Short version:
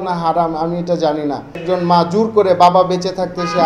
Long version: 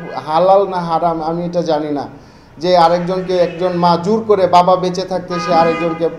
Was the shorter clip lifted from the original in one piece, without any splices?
no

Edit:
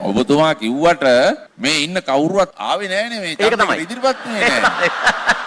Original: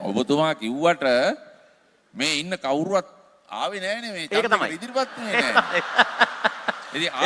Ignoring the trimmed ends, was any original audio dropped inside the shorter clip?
yes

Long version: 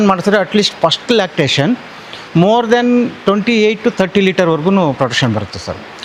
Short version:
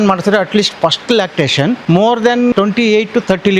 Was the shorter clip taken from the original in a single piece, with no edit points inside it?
no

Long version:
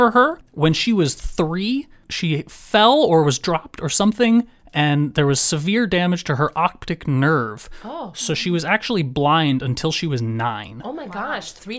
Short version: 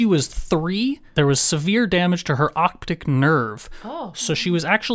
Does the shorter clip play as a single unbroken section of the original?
no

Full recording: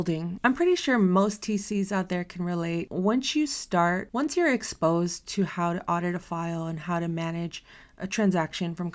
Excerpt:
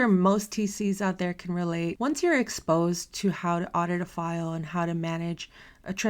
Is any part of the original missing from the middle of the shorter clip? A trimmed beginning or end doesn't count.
yes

